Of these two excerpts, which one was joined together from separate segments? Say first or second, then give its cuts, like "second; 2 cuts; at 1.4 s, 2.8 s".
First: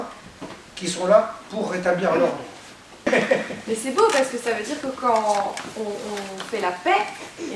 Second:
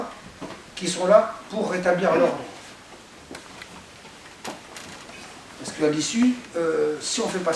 first; 1 cut; at 3.1 s